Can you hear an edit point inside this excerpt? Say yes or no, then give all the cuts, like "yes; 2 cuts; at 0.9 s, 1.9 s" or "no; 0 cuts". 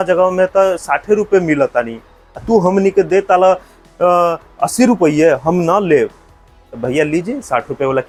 no; 0 cuts